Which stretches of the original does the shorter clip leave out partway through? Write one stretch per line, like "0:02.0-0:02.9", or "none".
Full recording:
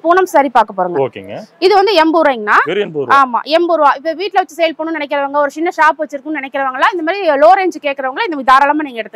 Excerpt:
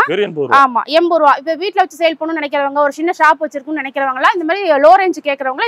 none